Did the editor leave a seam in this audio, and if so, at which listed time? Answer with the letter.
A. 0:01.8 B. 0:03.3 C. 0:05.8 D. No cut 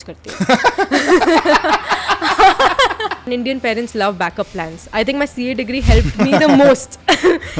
B